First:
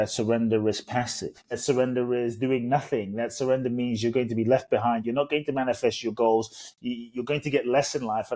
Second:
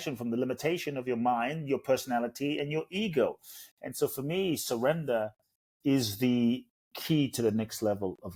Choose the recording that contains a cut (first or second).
first